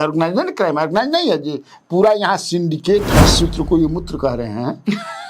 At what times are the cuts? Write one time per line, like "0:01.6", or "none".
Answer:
0:03.2